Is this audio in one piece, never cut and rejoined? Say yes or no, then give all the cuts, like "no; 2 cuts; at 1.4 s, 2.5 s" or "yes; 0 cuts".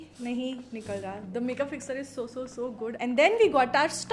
no; 1 cut; at 3.0 s